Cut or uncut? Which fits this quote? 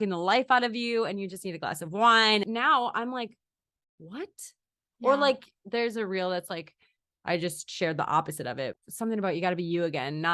cut